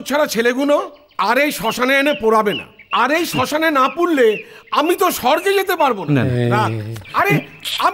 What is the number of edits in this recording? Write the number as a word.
zero